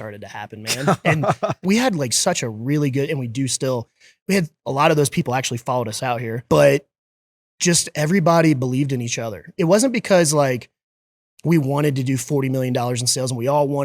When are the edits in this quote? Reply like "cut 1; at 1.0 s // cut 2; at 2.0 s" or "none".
cut 1; at 1.6 s // cut 2; at 6.3 s // cut 3; at 9.5 s